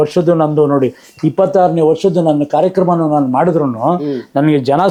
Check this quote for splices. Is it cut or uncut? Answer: uncut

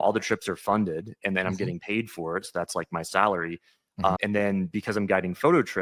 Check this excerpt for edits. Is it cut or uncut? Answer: cut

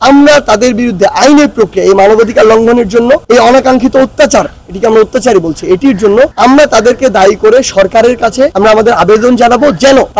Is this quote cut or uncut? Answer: uncut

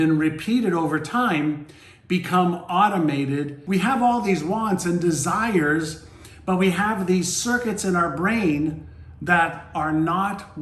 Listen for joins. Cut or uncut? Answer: cut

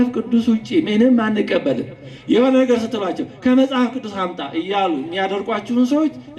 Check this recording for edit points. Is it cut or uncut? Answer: uncut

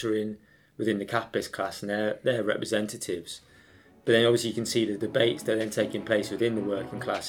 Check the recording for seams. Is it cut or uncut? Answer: uncut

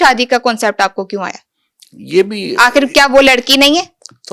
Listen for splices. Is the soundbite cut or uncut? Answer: uncut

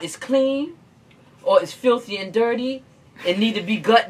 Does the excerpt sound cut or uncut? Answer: uncut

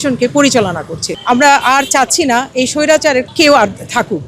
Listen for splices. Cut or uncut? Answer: cut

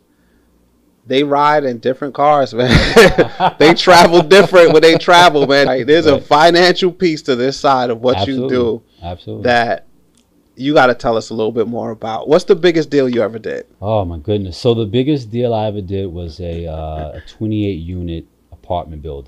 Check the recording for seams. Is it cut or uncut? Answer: cut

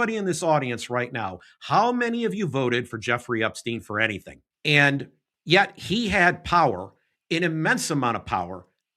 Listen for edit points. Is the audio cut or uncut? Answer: uncut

